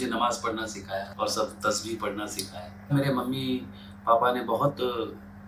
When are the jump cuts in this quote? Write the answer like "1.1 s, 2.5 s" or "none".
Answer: 1.1 s, 2.9 s